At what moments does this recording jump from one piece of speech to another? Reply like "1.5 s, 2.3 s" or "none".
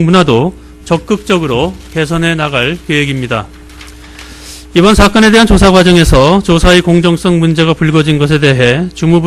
8.3 s